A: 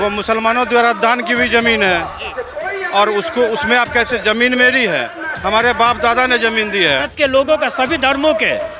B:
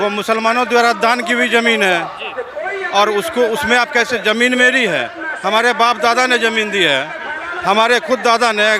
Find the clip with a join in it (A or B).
A